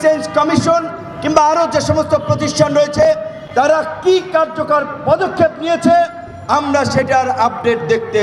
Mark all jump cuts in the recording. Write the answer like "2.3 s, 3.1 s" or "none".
none